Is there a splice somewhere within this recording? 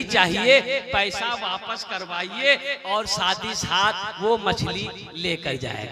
no; 0 cuts

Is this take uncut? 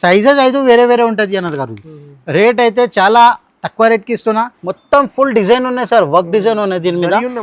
no; 1 cut; at 4.6 s

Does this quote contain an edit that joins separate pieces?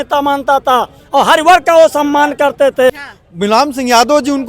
yes; 1 cut; at 3.1 s

